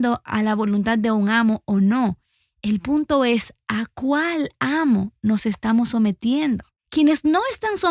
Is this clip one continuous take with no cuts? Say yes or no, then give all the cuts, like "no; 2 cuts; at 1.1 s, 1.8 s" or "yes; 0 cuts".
no; 1 cut; at 6.7 s